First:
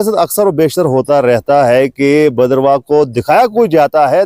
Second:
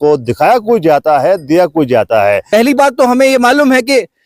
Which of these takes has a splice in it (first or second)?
second